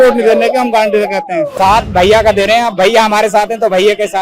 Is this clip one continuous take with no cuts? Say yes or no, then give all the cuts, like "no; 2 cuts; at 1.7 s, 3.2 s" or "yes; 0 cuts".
no; 1 cut; at 1.5 s